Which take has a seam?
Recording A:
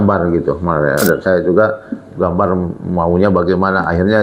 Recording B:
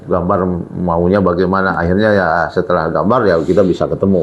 A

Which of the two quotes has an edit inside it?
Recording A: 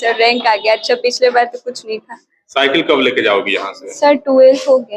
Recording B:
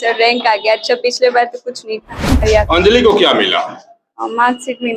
B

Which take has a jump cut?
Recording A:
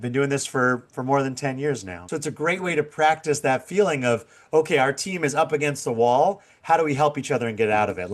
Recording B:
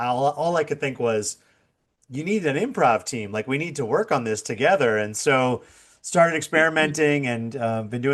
A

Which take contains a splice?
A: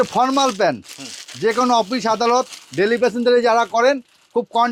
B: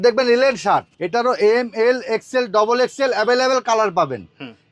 B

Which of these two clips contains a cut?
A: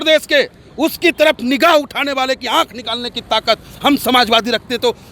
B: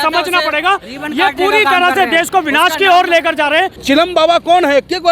B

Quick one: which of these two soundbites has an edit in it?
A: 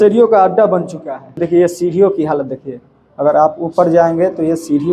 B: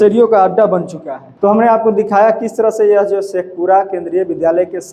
A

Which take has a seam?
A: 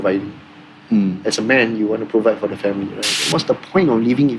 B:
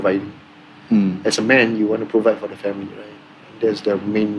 A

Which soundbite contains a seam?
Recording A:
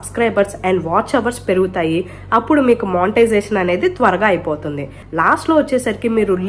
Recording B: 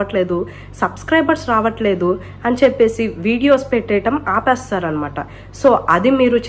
A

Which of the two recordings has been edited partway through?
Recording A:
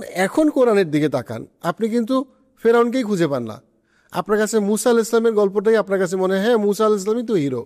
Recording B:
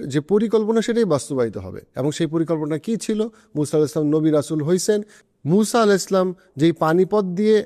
B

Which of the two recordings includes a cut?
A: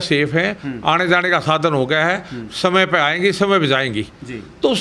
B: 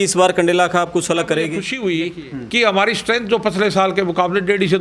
B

